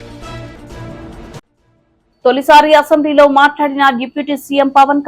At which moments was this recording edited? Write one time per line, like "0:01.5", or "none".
0:01.4